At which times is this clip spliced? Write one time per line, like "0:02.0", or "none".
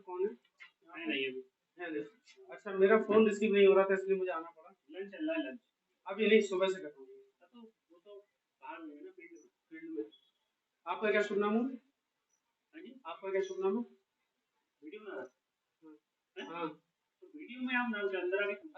none